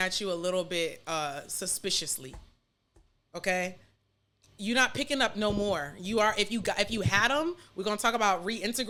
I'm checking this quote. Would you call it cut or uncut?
uncut